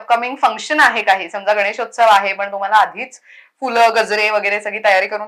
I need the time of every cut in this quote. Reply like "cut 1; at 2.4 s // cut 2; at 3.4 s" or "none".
none